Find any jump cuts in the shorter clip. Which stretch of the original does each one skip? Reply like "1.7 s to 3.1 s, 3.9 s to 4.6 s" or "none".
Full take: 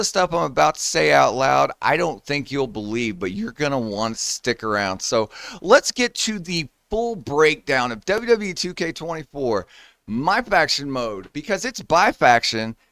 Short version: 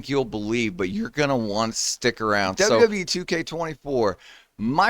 5.1 s to 8.2 s